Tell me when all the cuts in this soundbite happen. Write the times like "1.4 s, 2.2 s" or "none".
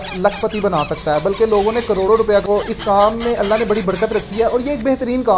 2.1 s